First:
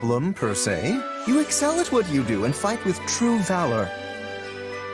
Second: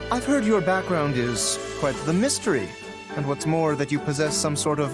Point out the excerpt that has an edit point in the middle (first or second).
first